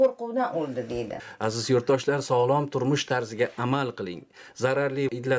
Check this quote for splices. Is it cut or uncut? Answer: cut